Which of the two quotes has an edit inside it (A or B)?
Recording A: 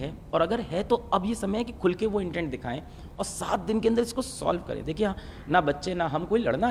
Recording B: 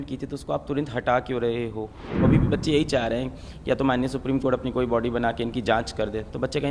B